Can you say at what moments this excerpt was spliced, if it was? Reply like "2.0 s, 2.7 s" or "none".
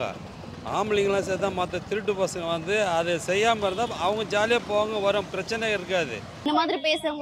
6.3 s

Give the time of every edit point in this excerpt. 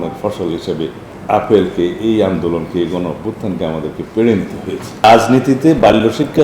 1.1 s, 5.0 s

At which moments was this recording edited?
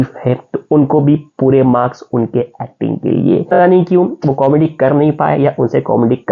3.6 s

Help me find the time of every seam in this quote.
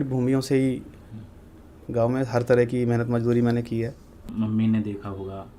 4.2 s

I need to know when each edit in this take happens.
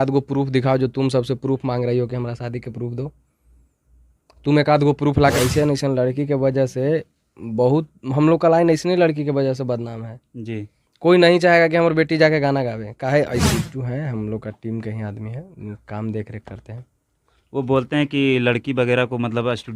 5.4 s, 13.4 s

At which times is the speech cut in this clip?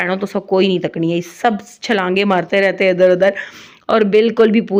none

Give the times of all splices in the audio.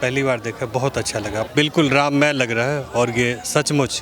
1.5 s

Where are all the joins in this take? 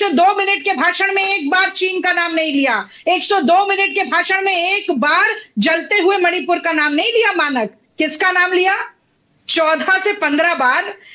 none

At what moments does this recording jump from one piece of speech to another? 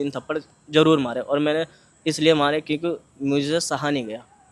none

